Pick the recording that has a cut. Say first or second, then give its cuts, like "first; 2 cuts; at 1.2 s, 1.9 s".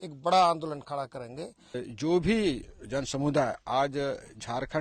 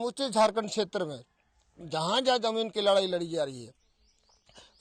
first; 1 cut; at 1.8 s